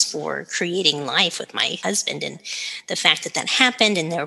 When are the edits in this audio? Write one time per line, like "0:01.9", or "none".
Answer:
0:01.8

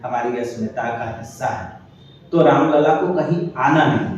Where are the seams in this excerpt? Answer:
none

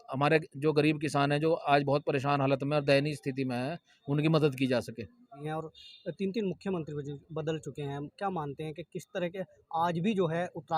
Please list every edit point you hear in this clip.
0:05.4

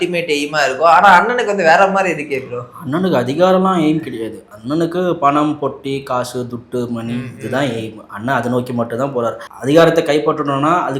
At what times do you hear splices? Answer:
0:09.5

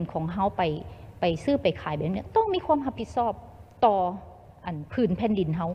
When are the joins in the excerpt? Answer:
none

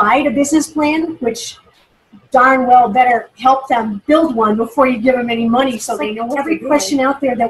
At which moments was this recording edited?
0:06.3

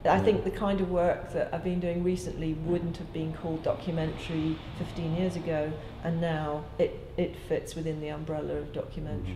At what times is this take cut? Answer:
0:08.2

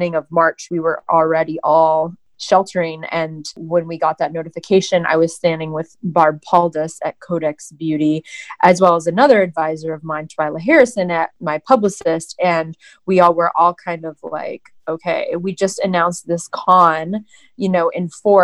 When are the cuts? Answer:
0:02.3
0:03.6
0:11.3

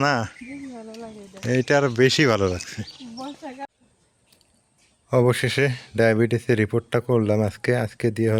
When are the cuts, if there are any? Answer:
0:03.7

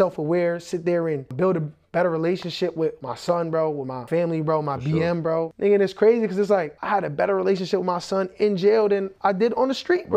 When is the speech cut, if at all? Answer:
0:01.3
0:03.0
0:04.0
0:05.5
0:06.8
0:09.1

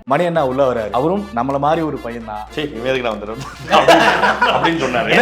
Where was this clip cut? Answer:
0:00.9
0:02.6

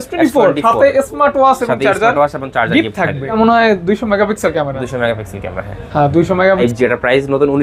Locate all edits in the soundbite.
0:03.3
0:06.5

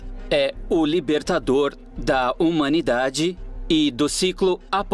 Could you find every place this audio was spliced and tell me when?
none

